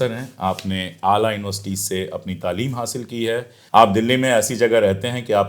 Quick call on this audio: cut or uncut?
uncut